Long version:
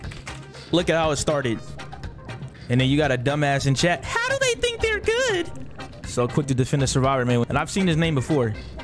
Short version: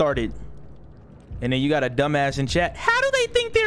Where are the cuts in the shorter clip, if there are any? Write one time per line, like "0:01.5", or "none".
none